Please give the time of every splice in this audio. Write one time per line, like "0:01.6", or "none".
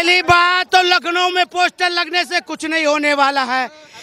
none